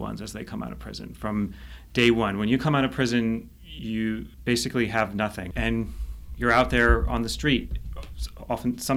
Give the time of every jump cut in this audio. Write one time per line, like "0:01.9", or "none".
0:05.5